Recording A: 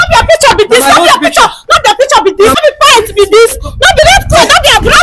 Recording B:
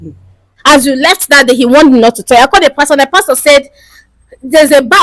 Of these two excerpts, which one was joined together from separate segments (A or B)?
A